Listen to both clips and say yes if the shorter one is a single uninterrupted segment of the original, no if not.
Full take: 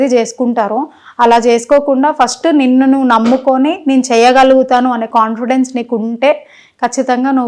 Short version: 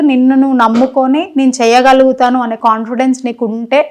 yes